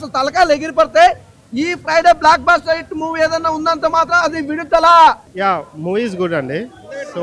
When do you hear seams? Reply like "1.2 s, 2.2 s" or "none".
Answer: none